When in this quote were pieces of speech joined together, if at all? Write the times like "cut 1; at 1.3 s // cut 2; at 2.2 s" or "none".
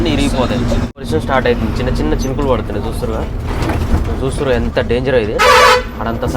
cut 1; at 1.1 s